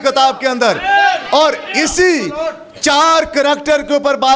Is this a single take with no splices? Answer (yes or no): yes